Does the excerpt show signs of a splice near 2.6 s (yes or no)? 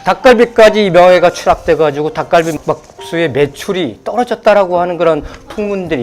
yes